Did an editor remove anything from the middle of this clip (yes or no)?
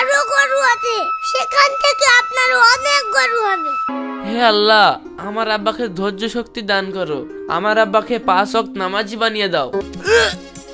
yes